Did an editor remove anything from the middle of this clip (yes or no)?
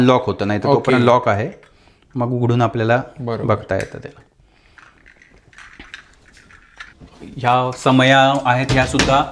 no